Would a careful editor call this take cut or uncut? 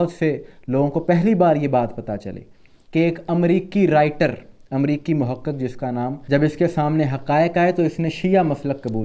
cut